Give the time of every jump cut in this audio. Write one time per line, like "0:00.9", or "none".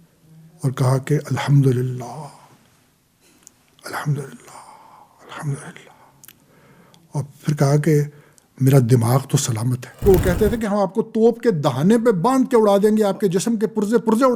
0:10.0